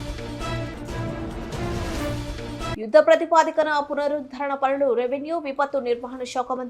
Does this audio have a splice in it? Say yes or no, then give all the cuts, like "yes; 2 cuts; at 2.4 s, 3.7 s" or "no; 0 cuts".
yes; 1 cut; at 2.8 s